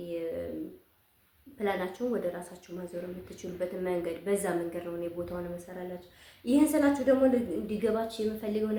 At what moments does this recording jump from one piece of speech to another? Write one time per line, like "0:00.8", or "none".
none